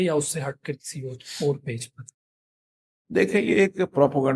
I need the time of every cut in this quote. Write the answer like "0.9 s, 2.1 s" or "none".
none